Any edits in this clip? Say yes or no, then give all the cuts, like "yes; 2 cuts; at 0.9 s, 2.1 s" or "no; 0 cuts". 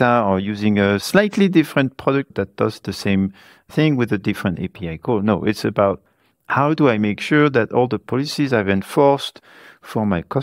yes; 3 cuts; at 1.0 s, 2.3 s, 3.7 s